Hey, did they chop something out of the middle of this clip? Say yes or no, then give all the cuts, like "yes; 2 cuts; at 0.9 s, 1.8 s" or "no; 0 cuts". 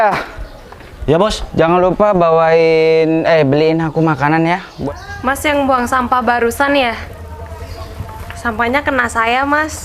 yes; 1 cut; at 4.7 s